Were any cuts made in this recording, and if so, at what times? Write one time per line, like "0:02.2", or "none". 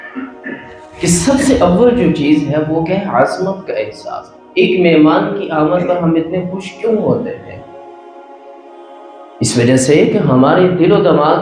none